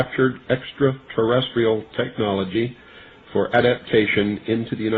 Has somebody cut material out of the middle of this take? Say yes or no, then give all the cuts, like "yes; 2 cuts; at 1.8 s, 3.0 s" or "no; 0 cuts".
yes; 1 cut; at 3.5 s